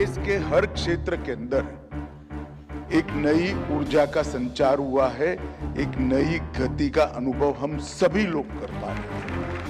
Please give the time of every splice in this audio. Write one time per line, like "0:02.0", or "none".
0:08.6